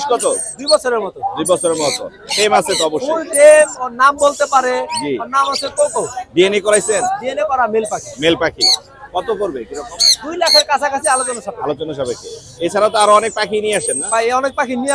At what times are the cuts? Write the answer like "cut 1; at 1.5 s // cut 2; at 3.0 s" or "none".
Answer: none